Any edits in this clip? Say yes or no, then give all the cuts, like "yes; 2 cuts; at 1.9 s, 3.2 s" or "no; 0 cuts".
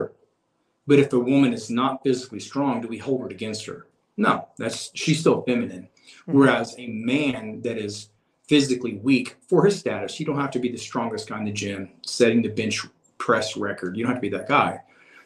no; 0 cuts